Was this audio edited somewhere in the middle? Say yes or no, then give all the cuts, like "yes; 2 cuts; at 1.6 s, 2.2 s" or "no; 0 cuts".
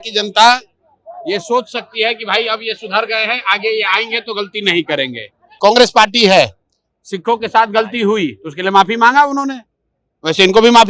yes; 1 cut; at 5.6 s